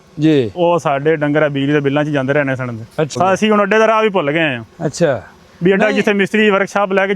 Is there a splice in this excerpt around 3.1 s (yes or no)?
yes